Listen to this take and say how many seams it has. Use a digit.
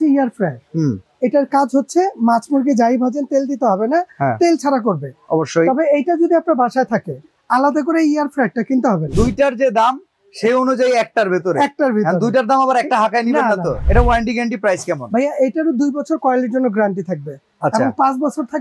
3